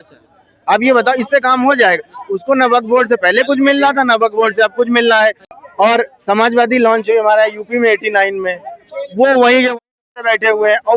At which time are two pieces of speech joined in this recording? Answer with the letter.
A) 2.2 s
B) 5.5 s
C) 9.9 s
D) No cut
B